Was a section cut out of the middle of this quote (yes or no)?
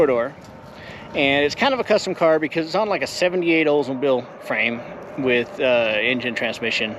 no